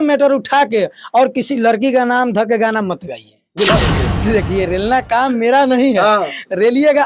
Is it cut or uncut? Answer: cut